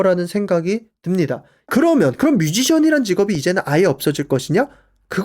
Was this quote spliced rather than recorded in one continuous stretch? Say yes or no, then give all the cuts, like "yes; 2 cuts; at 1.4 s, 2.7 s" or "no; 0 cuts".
yes; 1 cut; at 1.7 s